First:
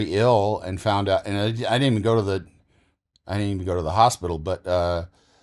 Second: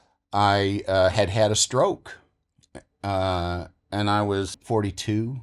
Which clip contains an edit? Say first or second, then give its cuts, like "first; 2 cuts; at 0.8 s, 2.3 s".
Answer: second; 1 cut; at 4.5 s